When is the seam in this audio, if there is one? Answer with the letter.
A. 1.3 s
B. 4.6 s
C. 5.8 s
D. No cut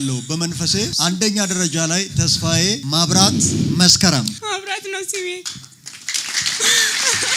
D